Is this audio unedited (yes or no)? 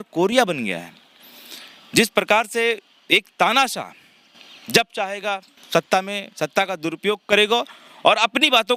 yes